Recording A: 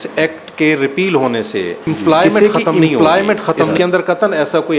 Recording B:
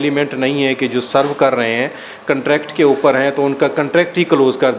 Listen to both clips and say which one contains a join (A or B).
A